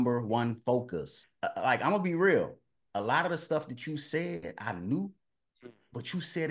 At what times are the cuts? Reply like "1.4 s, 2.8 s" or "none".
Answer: 1.2 s